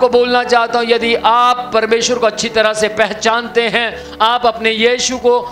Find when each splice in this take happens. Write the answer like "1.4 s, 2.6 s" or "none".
none

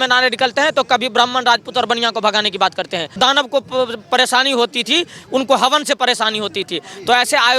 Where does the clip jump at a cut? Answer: 3.2 s

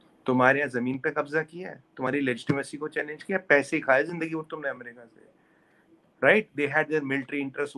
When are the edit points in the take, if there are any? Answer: none

